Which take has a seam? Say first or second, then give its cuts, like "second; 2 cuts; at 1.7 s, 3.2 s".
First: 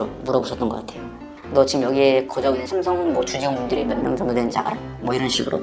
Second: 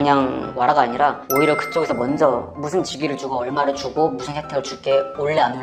first; 1 cut; at 1.4 s